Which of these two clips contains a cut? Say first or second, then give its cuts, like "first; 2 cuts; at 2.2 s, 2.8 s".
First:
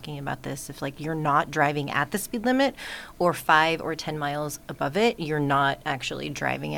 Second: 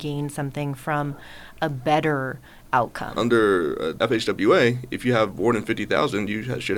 second; 2 cuts; at 3.0 s, 3.9 s